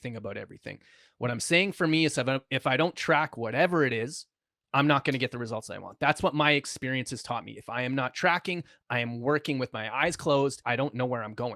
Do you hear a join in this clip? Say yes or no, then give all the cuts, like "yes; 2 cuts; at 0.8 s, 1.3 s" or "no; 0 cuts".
yes; 1 cut; at 10.6 s